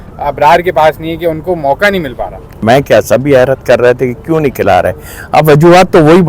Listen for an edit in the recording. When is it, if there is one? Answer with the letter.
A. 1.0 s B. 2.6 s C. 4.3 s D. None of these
B